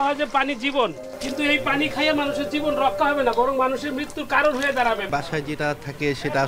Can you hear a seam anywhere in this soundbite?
yes; 2 cuts; at 1.1 s, 5.0 s

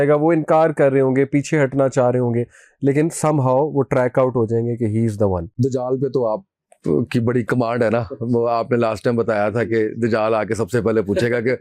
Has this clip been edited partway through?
yes; 1 cut; at 5.6 s

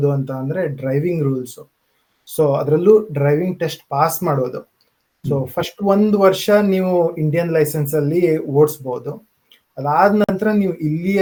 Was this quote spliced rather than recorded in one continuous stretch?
no; 0 cuts

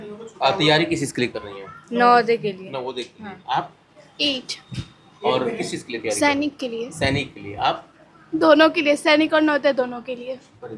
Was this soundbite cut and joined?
no; 0 cuts

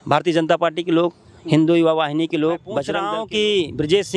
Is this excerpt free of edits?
no; 1 cut; at 2.9 s

